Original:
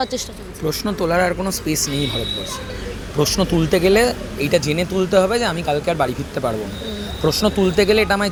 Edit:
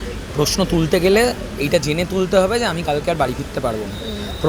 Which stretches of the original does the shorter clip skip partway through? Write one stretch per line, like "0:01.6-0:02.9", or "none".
none